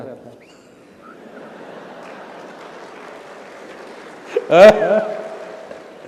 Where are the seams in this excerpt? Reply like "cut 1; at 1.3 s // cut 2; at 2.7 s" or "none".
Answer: none

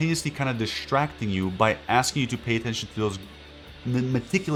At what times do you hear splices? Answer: none

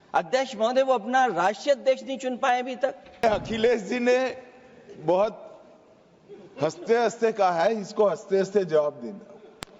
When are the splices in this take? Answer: cut 1; at 3.2 s

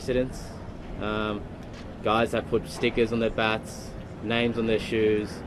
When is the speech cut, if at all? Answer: none

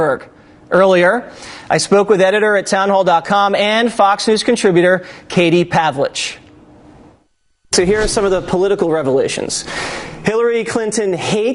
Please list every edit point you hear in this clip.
cut 1; at 1.4 s

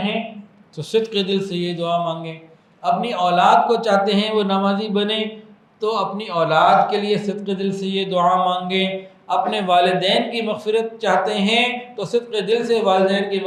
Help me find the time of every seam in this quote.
none

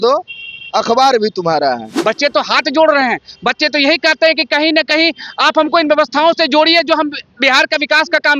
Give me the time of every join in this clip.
cut 1; at 1.9 s

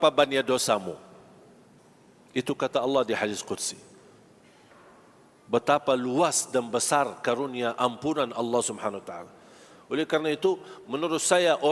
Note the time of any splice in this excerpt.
none

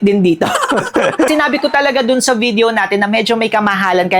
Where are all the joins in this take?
cut 1; at 1.3 s

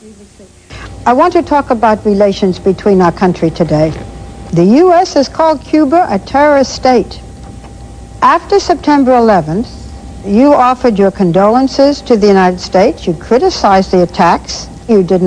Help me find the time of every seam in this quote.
cut 1; at 6.0 s

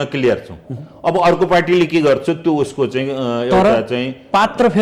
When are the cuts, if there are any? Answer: none

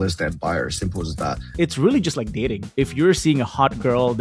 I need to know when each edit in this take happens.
cut 1; at 1.5 s // cut 2; at 2.6 s

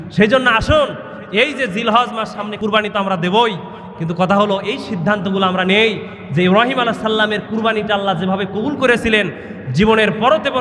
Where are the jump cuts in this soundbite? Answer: cut 1; at 2.5 s

